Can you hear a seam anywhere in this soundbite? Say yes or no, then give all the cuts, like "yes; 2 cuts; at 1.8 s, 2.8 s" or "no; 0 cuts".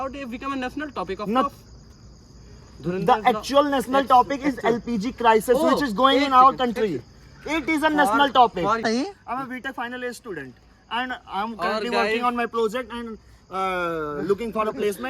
yes; 1 cut; at 8.8 s